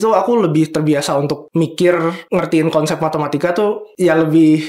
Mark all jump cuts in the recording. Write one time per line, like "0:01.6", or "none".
0:01.4
0:02.2
0:03.9